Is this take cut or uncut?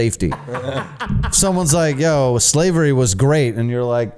uncut